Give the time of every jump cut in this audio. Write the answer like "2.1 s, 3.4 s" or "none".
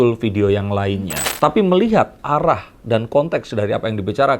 1.1 s